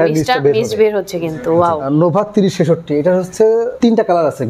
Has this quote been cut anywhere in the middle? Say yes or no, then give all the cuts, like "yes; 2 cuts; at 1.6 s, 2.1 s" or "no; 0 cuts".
yes; 2 cuts; at 1.9 s, 3.7 s